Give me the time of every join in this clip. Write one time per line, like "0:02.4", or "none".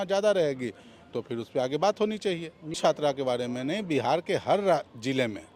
0:02.8